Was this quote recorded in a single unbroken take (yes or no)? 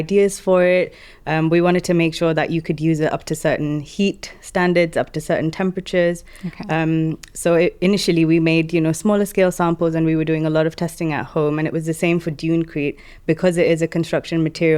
yes